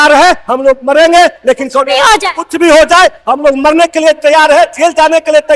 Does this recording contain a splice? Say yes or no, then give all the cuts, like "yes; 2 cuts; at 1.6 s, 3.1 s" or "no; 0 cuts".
no; 0 cuts